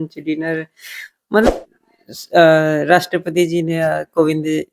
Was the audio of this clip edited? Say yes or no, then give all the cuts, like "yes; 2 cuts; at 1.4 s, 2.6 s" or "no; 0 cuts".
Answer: yes; 1 cut; at 1.5 s